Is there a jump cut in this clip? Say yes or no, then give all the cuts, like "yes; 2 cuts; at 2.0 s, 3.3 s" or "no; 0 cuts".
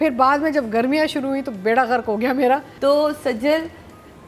yes; 1 cut; at 2.7 s